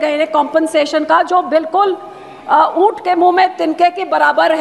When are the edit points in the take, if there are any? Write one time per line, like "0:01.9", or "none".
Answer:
none